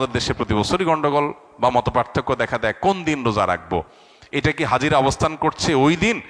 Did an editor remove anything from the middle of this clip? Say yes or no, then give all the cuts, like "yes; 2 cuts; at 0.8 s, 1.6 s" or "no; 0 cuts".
no; 0 cuts